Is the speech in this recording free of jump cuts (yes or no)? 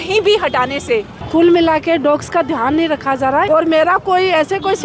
no